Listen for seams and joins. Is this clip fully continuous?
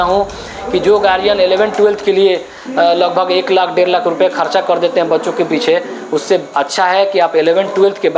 yes; 0 cuts

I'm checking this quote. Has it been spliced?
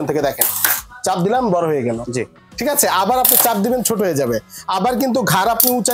no; 0 cuts

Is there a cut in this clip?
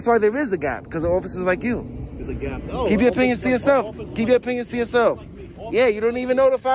no; 0 cuts

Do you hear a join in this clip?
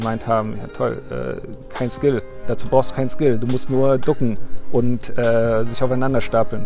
no; 0 cuts

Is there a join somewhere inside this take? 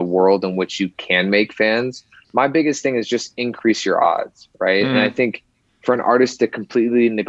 yes; 1 cut; at 2.1 s

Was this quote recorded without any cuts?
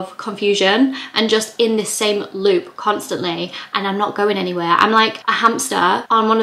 no; 1 cut; at 5.2 s

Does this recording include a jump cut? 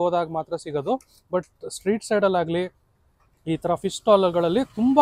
no; 0 cuts

